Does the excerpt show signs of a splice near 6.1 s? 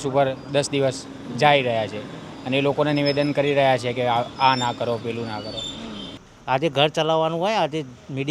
yes; 1 cut; at 6.1 s

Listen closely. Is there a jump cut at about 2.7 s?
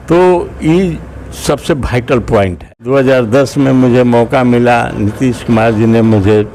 yes; 1 cut; at 2.7 s

